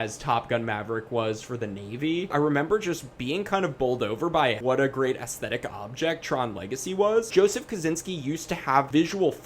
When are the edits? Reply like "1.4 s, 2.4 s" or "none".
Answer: 2.3 s, 7.3 s